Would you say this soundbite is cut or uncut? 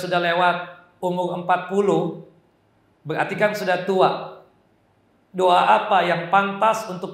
uncut